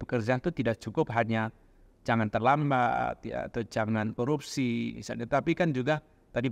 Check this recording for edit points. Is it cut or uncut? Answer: uncut